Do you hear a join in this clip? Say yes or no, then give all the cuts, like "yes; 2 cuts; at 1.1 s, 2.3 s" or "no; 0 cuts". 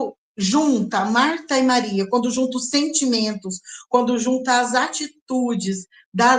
no; 0 cuts